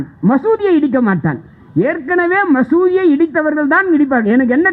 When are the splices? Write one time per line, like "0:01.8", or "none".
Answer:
none